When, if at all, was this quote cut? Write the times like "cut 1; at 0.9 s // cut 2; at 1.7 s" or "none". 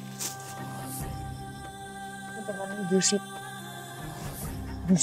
cut 1; at 2.4 s

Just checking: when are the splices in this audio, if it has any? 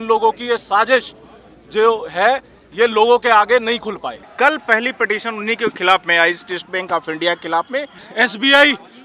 cut 1; at 4.2 s // cut 2; at 8.0 s

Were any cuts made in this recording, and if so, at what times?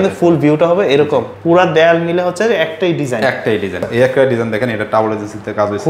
cut 1; at 1.3 s // cut 2; at 3.9 s

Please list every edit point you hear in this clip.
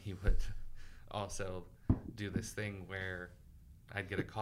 none

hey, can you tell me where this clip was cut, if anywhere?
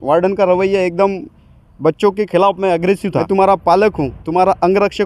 cut 1; at 3.1 s

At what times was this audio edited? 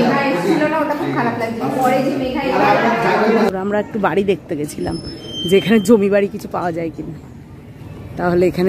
cut 1; at 3.5 s

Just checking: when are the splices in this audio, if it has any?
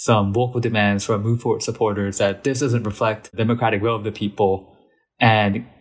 cut 1; at 3.4 s

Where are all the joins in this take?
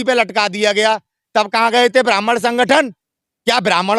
none

